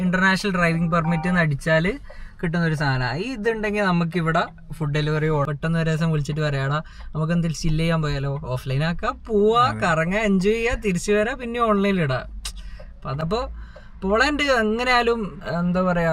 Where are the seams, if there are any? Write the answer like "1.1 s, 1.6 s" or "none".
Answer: 5.5 s, 13.0 s